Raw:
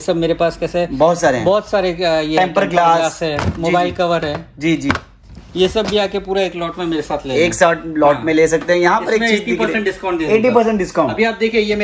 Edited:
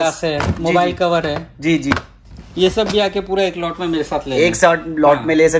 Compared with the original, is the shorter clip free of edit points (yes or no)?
yes